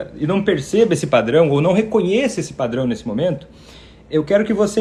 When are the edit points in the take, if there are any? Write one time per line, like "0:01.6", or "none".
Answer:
none